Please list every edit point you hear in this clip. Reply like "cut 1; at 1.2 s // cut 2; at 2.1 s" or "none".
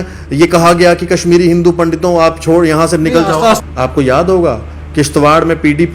cut 1; at 3.6 s